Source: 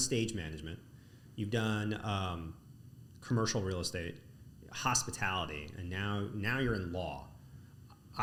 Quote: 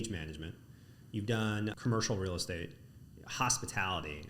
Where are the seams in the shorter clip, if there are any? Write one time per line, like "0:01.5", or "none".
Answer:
0:01.8